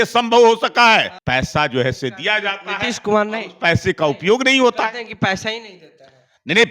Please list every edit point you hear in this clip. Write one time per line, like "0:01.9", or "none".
0:01.2